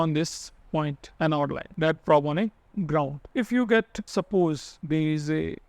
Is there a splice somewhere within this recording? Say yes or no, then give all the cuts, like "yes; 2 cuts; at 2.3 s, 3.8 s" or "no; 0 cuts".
yes; 5 cuts; at 1.0 s, 1.7 s, 3.2 s, 4.0 s, 4.7 s